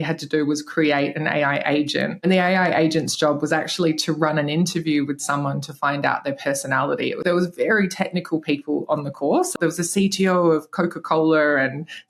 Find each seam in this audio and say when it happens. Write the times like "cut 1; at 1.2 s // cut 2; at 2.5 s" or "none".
cut 1; at 2.2 s // cut 2; at 7.2 s // cut 3; at 9.6 s